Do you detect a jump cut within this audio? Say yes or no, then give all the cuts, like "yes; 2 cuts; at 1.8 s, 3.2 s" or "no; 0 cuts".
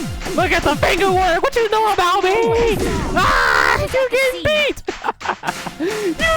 no; 0 cuts